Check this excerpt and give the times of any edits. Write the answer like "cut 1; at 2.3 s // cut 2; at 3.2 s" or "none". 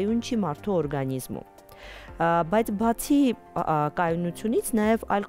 none